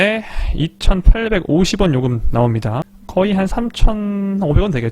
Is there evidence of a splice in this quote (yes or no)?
yes